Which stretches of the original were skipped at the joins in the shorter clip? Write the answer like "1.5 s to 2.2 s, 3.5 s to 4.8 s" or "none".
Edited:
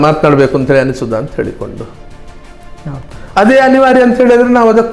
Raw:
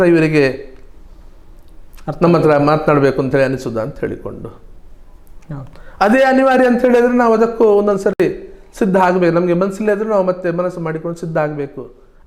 none